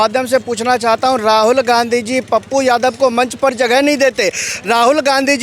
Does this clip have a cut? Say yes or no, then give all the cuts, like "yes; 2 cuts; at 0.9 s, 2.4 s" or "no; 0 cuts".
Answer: no; 0 cuts